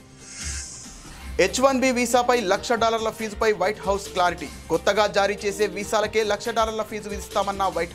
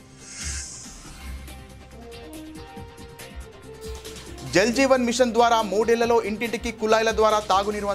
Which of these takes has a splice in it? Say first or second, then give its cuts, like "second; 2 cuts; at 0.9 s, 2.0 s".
first; 1 cut; at 1.3 s